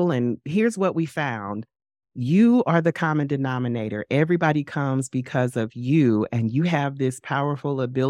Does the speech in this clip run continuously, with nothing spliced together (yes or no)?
yes